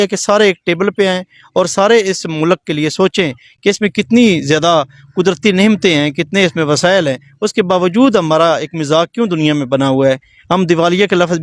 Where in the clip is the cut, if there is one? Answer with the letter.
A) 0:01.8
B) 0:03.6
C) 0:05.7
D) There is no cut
D